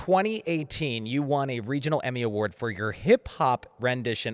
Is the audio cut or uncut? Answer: uncut